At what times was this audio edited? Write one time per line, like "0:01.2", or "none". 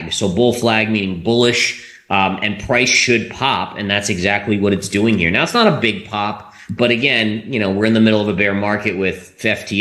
none